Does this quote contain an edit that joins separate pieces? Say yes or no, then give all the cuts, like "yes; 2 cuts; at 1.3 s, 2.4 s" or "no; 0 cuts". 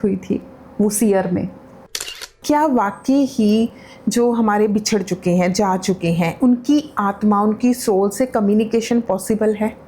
yes; 1 cut; at 2.2 s